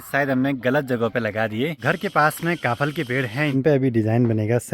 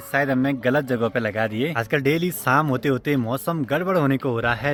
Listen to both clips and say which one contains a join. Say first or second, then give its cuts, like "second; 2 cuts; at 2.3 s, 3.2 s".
first; 2 cuts; at 1.8 s, 3.5 s